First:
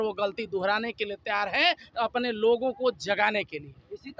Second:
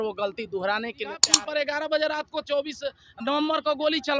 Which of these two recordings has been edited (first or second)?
second